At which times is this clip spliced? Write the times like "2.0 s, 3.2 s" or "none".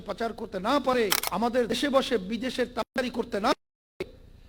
1.2 s